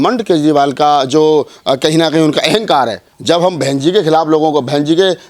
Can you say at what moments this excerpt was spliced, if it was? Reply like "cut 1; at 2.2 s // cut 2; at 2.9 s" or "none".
cut 1; at 3.1 s